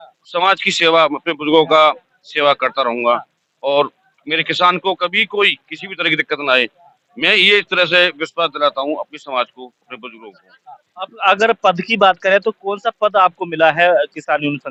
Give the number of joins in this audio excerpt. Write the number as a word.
zero